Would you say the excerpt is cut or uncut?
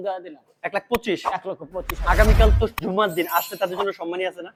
uncut